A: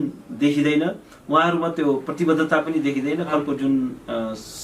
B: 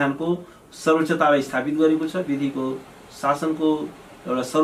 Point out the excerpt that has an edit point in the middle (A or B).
A